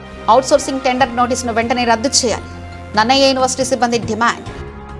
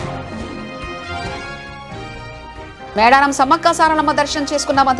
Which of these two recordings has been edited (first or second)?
second